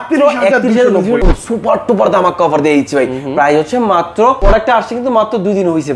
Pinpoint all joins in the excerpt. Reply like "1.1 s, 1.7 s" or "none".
1.2 s, 4.4 s